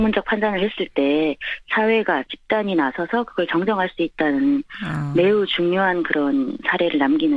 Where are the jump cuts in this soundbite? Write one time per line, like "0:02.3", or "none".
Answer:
0:03.9